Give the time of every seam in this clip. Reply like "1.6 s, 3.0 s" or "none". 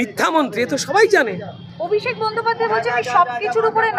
none